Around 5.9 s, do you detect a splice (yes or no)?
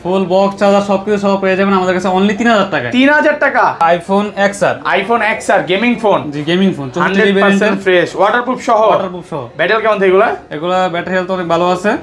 no